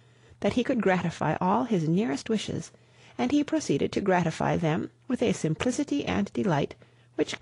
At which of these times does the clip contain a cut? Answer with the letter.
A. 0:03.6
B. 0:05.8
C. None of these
A